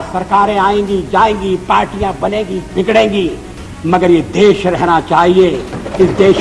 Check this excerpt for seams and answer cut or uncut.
uncut